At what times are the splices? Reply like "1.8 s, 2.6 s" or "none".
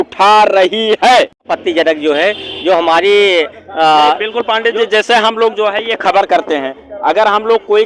1.5 s